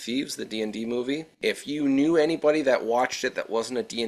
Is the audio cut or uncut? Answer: cut